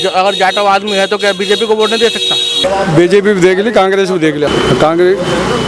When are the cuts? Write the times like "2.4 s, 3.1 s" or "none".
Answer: 2.6 s, 4.5 s